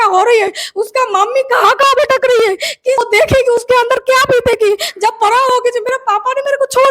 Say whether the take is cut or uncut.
cut